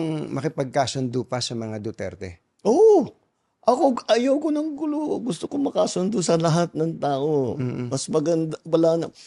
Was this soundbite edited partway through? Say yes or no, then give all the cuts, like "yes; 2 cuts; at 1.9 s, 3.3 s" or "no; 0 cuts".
no; 0 cuts